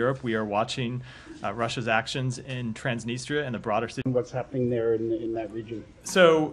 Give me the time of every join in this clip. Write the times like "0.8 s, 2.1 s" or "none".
none